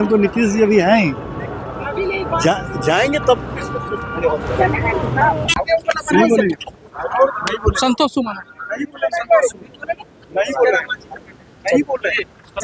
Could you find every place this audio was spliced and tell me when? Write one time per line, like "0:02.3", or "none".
none

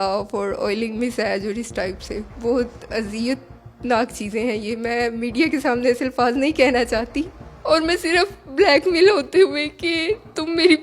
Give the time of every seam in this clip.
none

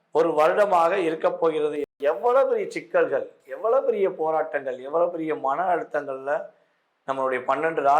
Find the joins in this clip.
0:02.0

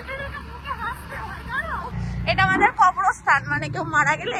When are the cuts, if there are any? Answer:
0:01.9

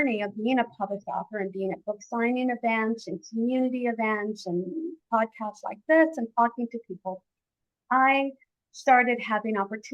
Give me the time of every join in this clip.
none

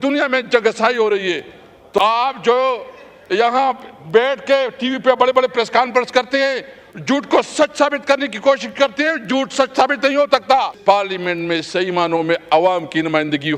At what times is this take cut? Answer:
0:02.0
0:10.7

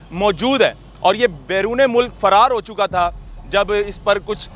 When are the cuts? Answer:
none

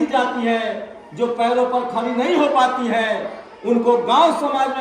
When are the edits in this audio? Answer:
none

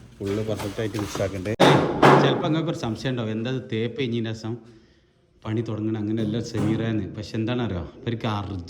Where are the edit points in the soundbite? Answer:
0:01.6

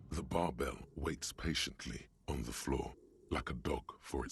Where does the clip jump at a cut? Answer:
none

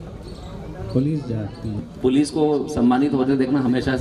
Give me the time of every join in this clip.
0:01.9

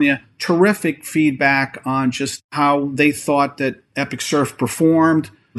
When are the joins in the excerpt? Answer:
none

